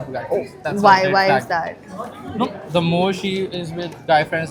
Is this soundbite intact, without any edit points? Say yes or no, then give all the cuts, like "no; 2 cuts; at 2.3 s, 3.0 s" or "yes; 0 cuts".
yes; 0 cuts